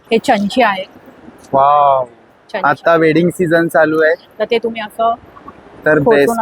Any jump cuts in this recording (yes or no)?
no